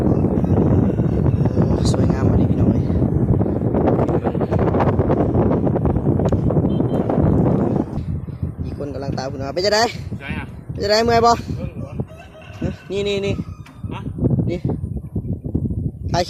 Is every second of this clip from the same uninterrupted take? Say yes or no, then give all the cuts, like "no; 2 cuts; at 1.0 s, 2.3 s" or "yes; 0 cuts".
yes; 0 cuts